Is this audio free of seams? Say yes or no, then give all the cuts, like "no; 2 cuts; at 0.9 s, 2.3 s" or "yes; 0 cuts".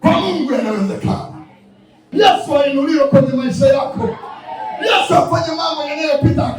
no; 1 cut; at 2.0 s